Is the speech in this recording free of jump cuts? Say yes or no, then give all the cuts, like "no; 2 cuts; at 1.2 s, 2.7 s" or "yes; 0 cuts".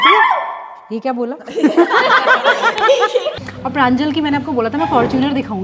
no; 1 cut; at 3.3 s